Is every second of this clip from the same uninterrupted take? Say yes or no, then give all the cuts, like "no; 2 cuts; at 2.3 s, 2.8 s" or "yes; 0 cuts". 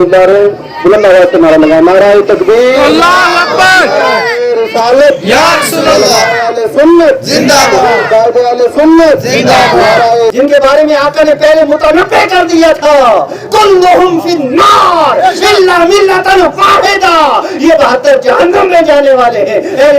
no; 1 cut; at 10.3 s